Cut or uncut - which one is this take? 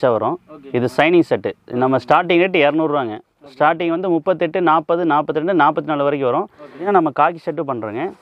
cut